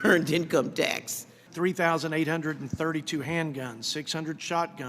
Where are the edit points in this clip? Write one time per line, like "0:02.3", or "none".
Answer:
0:01.4